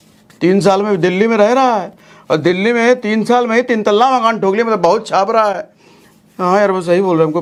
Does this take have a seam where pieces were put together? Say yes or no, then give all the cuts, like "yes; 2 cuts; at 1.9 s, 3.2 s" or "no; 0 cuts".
no; 0 cuts